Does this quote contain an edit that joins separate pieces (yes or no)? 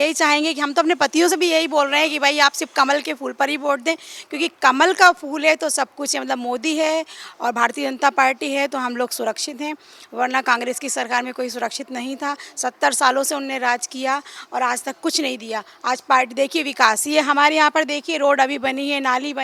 no